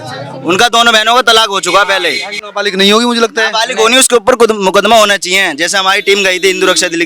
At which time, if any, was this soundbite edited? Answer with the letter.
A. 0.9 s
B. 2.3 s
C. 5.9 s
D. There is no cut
B